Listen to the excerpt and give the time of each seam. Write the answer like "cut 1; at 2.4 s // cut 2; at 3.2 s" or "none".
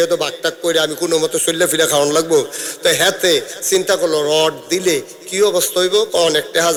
none